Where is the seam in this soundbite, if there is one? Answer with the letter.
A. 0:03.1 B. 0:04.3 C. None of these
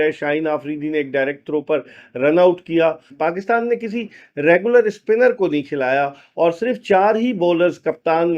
A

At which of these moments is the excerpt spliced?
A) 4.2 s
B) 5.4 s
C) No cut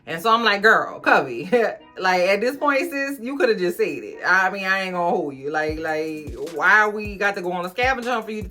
C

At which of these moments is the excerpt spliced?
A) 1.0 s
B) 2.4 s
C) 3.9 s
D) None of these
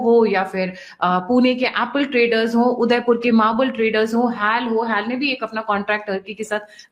D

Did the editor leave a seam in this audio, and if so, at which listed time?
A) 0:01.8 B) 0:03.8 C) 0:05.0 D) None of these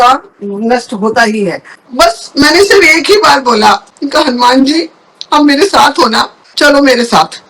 A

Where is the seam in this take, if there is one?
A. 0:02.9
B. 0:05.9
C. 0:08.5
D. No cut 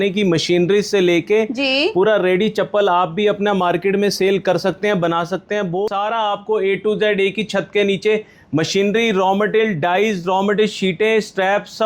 B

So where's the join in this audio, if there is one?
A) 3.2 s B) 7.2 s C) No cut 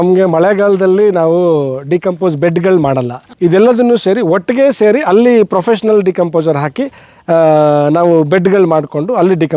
A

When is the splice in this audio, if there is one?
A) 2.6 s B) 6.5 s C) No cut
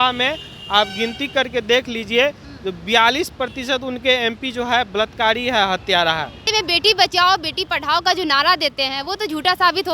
B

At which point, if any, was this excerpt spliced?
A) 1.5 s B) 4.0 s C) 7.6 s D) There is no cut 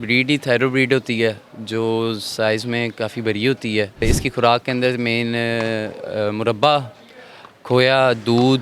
B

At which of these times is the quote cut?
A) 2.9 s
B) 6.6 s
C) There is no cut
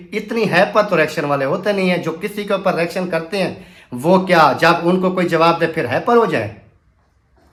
C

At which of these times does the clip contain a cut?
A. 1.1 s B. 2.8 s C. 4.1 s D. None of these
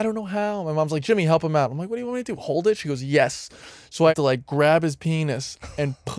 C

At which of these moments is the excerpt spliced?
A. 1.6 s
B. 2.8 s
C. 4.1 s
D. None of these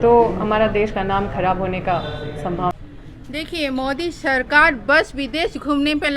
B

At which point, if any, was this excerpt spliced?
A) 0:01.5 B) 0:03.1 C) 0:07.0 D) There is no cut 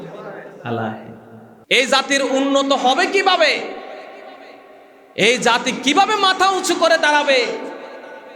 A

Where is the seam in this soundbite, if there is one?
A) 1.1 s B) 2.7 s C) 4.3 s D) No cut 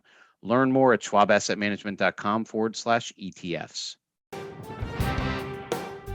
C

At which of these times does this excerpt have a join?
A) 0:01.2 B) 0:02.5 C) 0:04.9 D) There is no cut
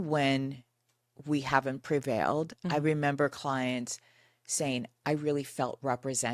D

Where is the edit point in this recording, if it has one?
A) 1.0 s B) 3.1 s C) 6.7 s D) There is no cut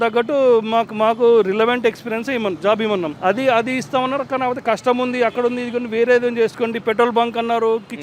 B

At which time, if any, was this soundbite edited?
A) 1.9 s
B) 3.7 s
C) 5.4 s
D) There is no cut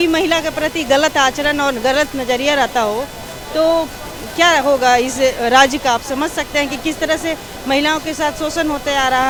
D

